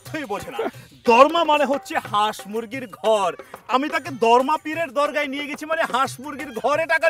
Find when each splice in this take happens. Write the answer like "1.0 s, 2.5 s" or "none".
none